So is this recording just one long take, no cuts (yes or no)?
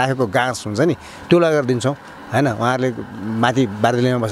yes